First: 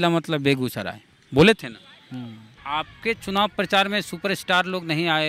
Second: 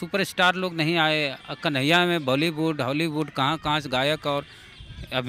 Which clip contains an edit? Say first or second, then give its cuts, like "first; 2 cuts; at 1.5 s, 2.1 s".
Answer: first; 1 cut; at 2.5 s